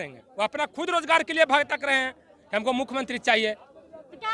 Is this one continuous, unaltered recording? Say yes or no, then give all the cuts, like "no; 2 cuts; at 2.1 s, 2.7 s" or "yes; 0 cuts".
yes; 0 cuts